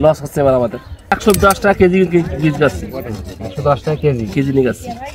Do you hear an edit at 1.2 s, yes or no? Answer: yes